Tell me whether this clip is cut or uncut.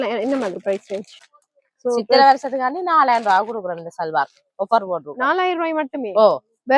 cut